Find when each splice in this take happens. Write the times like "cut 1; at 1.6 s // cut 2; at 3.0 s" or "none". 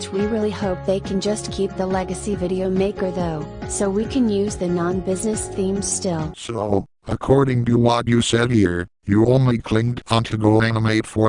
none

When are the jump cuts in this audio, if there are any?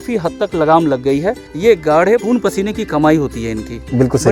cut 1; at 1.5 s

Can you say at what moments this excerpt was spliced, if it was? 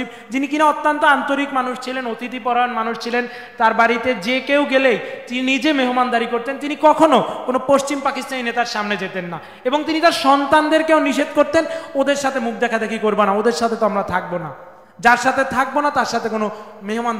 none

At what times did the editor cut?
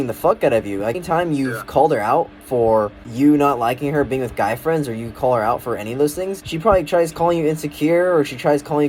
cut 1; at 1.0 s // cut 2; at 3.0 s // cut 3; at 6.4 s

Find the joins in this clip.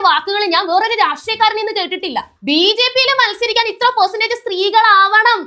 cut 1; at 2.3 s

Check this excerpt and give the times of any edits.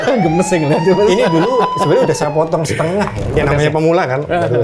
cut 1; at 3.4 s

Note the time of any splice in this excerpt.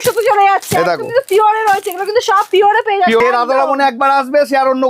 cut 1; at 3.2 s

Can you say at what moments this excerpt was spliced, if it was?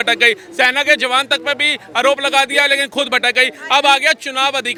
none

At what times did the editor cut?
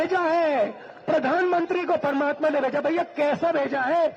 none

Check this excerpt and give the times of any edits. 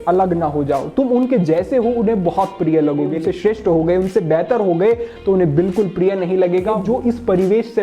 cut 1; at 3.2 s // cut 2; at 6.8 s

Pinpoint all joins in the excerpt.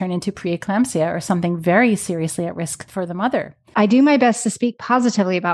cut 1; at 2.8 s // cut 2; at 3.5 s

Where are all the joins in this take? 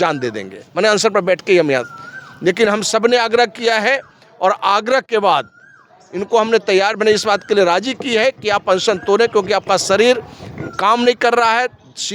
none

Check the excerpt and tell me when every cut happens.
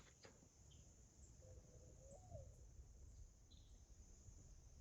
cut 1; at 3.1 s

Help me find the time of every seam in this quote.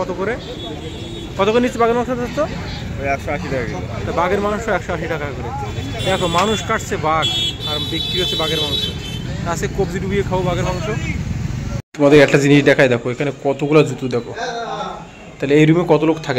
cut 1; at 11.8 s

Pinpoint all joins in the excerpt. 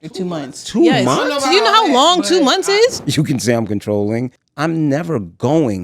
cut 1; at 3.0 s // cut 2; at 4.4 s

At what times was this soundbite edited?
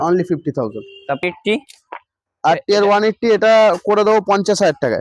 cut 1; at 1.2 s

